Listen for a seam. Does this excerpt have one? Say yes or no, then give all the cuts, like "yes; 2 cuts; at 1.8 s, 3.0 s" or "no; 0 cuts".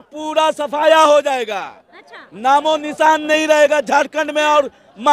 no; 0 cuts